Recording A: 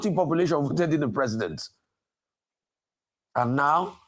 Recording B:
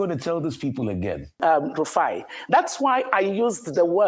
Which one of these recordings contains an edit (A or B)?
B